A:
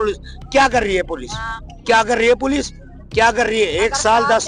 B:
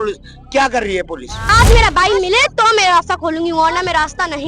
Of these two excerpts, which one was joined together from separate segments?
B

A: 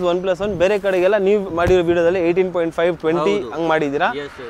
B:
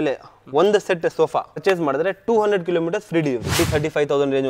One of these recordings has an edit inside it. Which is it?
B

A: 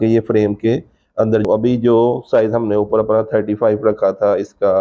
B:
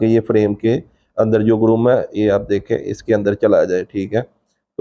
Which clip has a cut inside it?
A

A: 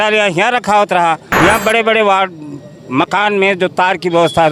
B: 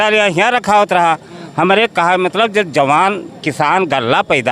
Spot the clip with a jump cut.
A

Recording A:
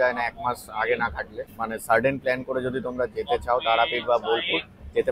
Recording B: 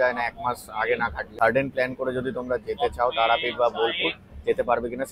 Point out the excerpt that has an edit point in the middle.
B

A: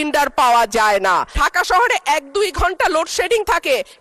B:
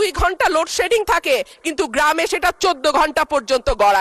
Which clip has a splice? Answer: A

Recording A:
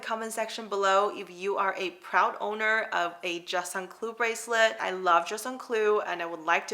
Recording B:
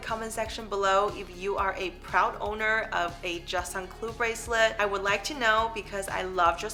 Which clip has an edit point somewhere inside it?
A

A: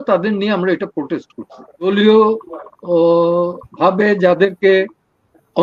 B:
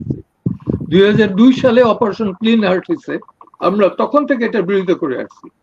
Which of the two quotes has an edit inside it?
A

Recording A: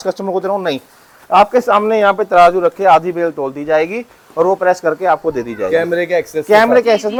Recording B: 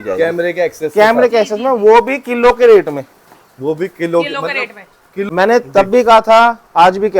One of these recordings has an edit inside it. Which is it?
B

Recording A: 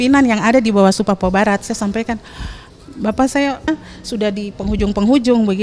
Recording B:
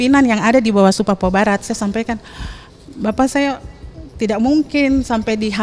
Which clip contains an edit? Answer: A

